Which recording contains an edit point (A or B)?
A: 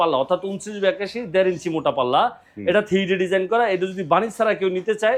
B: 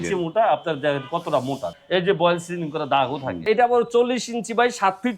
B